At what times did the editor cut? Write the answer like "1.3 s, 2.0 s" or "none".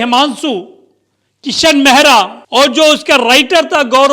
2.4 s

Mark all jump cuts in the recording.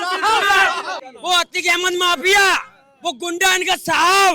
0.9 s

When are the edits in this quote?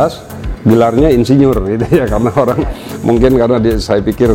none

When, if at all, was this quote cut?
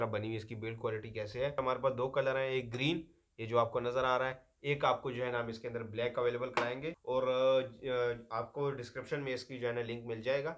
1.6 s, 7.0 s

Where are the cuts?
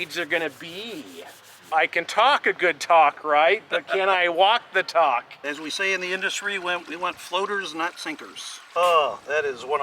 1.7 s, 5.5 s, 8.7 s

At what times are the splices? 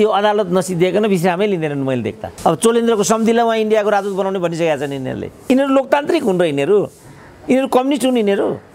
2.2 s, 5.4 s

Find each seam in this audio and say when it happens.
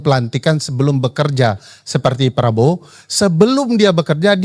none

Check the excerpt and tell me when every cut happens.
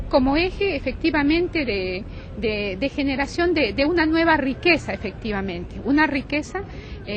none

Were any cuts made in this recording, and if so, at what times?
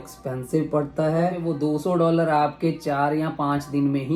1.4 s

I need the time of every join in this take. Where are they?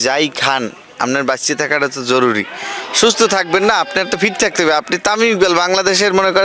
none

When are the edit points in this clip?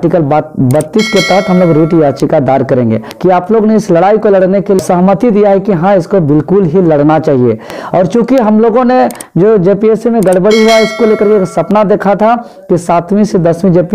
3.1 s, 4.8 s

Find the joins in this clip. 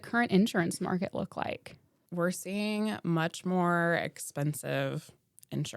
2.0 s

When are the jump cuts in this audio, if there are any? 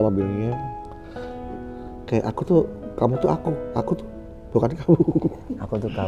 1.4 s

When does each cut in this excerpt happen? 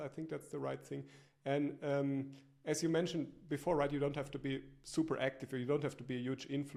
none

